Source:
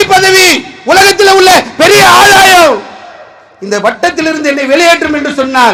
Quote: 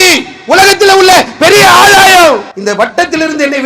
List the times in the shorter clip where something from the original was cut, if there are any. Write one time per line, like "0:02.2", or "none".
0:02.5